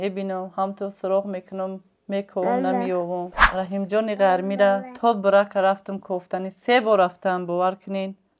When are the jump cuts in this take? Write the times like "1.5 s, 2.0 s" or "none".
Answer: 3.4 s